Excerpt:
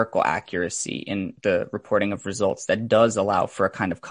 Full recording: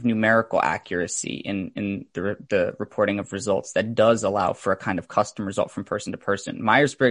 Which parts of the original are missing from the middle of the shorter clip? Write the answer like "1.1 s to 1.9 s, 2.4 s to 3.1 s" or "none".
1.7 s to 2.4 s

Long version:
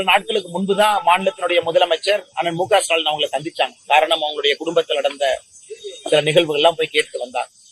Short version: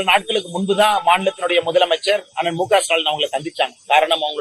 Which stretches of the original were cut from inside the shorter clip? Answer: none

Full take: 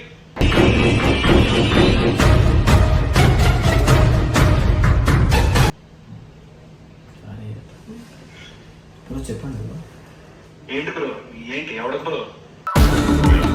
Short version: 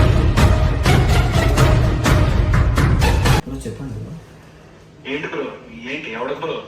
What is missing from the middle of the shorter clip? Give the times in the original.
5.7 s to 9.1 s

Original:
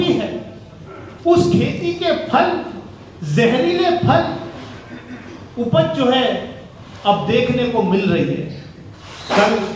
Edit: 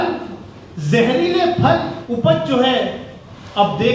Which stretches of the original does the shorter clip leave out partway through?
4.4 s to 5.5 s

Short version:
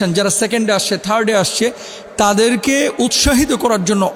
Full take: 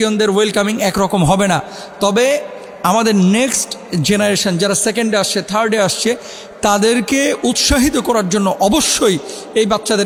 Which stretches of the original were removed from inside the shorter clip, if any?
none

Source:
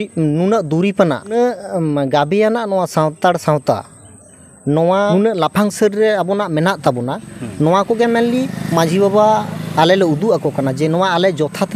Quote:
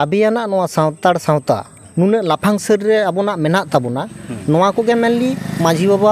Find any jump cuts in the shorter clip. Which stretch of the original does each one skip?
4.2 s to 5.1 s

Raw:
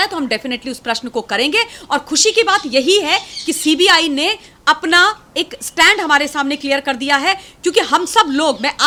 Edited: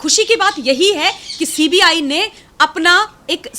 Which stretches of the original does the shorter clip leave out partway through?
none

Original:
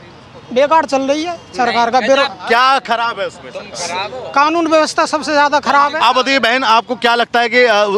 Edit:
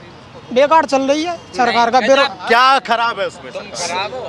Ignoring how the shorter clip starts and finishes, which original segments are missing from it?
none

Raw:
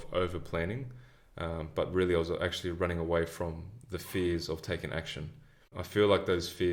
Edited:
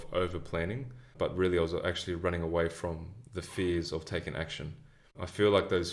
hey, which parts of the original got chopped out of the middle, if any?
1.1 s to 1.7 s

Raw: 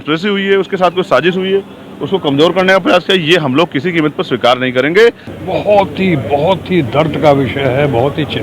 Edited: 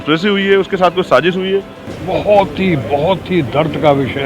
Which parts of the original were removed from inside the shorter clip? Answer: 1.9 s to 5.3 s

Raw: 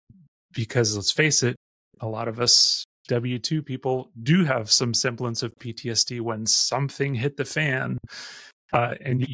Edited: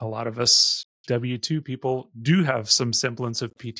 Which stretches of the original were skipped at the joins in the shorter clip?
none

